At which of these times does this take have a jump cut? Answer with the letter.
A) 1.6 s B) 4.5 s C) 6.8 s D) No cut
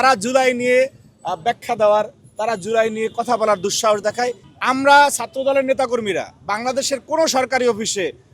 B